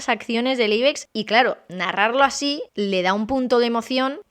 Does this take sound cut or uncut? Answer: cut